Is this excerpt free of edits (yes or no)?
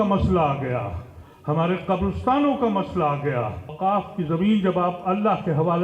no